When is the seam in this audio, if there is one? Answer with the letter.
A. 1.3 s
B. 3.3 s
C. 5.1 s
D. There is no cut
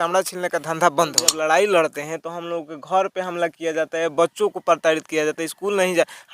A